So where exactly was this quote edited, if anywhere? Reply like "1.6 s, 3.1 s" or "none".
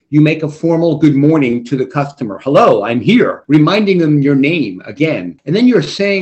3.4 s, 5.4 s